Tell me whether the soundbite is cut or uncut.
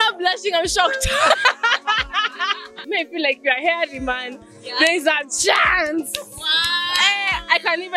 cut